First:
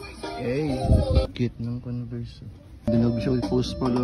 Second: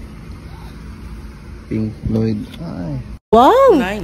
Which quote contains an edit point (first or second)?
first